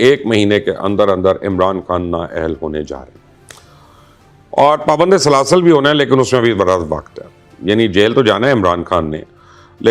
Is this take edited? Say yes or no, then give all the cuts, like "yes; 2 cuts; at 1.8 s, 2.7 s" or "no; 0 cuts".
no; 0 cuts